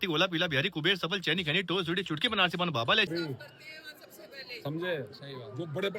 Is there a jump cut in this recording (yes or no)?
yes